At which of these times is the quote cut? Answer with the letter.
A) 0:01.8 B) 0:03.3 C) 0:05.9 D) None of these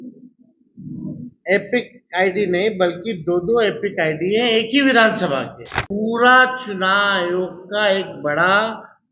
C